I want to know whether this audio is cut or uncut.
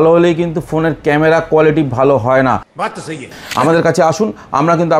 cut